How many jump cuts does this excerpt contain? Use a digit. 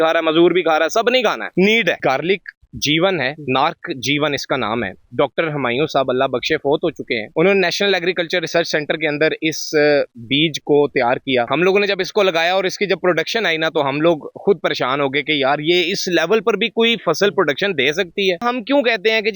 3